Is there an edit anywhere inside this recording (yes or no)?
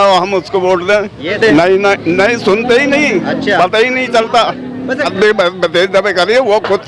yes